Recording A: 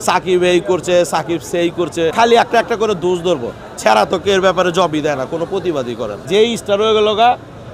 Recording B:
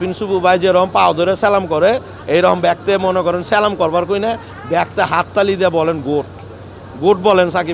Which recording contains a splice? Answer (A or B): A